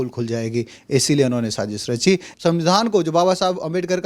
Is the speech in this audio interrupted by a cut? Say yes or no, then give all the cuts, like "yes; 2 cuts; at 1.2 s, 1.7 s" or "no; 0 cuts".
yes; 1 cut; at 2.3 s